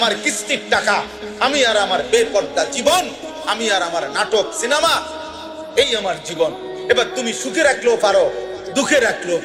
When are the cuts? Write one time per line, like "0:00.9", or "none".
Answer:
none